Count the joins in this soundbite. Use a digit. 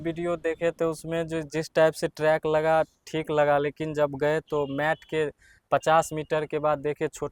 0